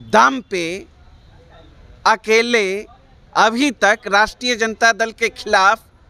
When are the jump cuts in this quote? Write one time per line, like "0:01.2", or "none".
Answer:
none